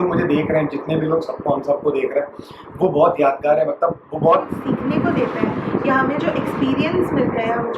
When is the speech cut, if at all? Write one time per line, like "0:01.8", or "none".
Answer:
0:04.5